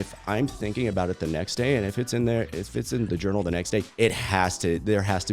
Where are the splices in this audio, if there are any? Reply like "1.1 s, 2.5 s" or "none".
3.9 s